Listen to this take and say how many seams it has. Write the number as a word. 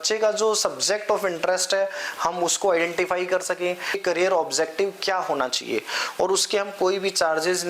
one